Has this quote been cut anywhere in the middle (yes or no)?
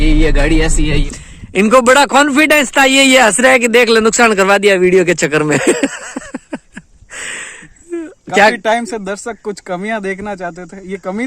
yes